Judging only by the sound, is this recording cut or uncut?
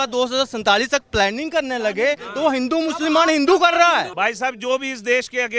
cut